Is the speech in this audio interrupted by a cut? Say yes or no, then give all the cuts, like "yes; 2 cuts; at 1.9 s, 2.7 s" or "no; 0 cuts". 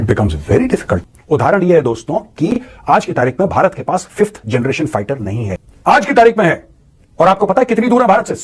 yes; 2 cuts; at 1.0 s, 5.6 s